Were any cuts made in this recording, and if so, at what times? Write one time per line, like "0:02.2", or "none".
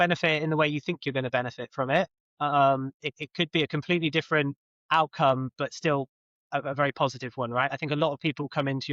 none